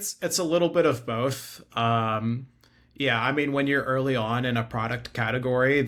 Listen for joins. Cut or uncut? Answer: uncut